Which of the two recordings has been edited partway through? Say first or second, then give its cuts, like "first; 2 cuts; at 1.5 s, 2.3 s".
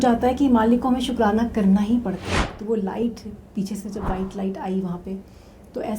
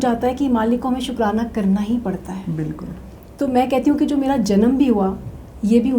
first; 1 cut; at 2.3 s